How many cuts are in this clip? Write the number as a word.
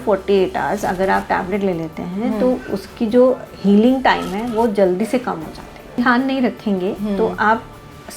one